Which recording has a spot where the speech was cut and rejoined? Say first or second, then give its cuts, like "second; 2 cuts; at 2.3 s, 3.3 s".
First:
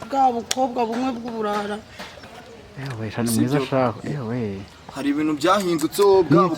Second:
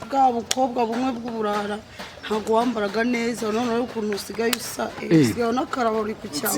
first; 1 cut; at 2.2 s